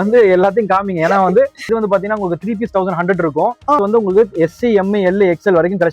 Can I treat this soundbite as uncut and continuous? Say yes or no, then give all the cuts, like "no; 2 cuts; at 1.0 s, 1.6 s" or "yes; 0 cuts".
no; 2 cuts; at 1.7 s, 3.8 s